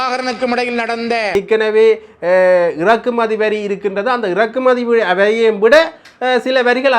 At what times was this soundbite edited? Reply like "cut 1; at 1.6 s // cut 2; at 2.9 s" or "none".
cut 1; at 1.3 s